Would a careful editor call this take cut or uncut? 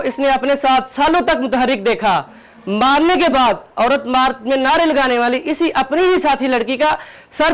uncut